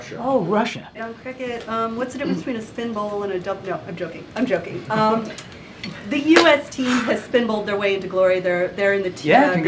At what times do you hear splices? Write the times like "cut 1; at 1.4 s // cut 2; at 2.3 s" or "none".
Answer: cut 1; at 1.1 s